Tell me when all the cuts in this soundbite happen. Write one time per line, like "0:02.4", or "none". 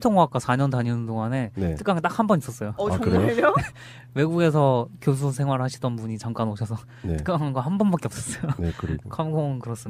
none